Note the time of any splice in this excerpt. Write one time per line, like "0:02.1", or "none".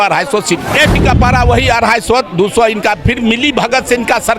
0:01.0